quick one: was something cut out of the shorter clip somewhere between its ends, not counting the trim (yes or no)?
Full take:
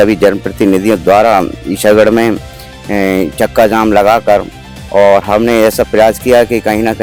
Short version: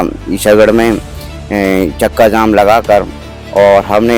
no